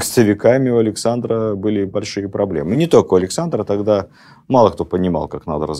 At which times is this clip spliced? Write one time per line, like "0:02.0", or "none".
none